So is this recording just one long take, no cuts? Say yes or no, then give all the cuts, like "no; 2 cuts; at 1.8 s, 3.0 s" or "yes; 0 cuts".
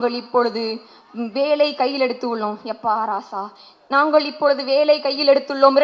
yes; 0 cuts